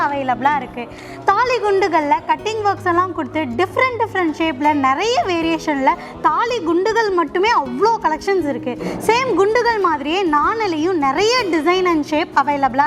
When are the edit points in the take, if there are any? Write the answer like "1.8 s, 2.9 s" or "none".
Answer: none